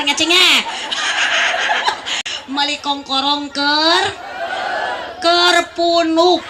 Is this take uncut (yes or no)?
no